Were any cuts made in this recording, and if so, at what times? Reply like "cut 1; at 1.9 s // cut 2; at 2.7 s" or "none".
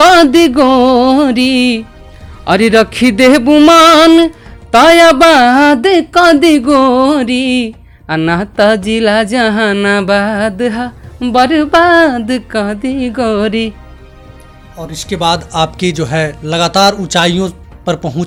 none